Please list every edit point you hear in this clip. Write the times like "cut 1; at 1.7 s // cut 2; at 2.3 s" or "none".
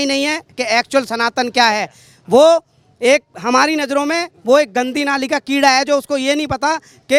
none

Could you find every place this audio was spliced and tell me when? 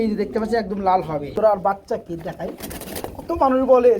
cut 1; at 1.5 s

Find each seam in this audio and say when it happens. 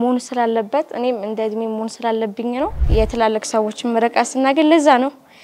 cut 1; at 2.8 s

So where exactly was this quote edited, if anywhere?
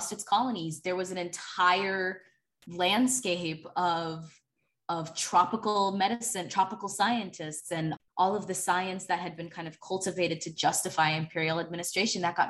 cut 1; at 7.9 s

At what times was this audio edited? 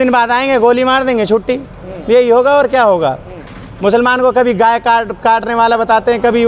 none

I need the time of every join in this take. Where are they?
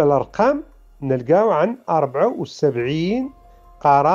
none

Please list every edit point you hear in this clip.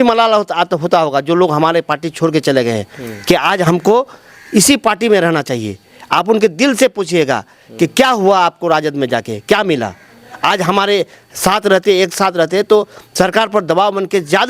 none

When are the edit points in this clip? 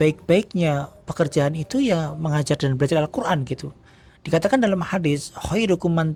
none

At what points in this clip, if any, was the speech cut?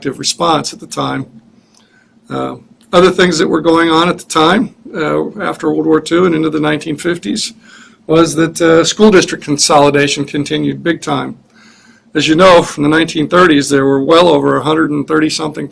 none

